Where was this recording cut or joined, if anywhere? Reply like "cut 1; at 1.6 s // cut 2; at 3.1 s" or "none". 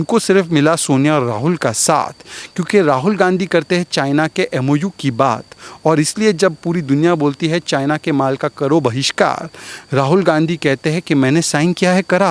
none